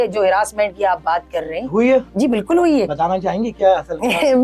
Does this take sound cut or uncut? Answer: uncut